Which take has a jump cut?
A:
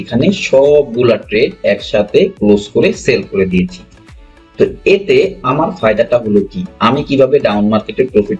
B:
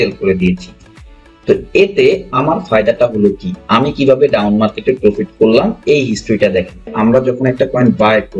B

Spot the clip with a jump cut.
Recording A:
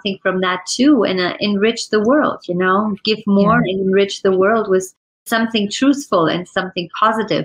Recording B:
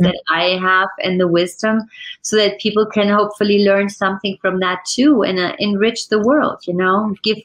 A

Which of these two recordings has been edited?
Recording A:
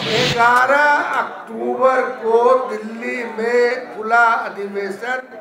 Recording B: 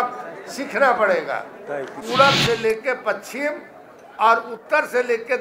B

